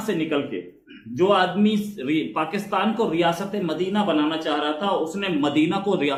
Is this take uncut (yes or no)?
yes